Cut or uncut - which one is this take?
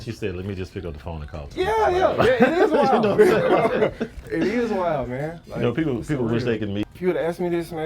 cut